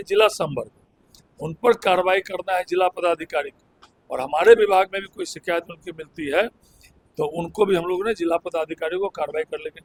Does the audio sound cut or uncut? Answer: uncut